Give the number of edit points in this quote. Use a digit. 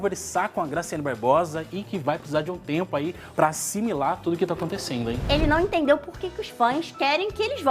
1